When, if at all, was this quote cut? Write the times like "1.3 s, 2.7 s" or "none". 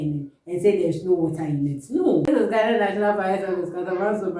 2.3 s